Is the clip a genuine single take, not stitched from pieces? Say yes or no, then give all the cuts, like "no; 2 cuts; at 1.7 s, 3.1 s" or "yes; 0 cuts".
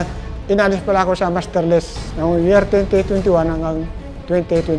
yes; 0 cuts